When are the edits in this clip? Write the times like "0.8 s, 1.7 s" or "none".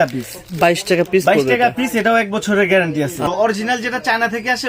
3.2 s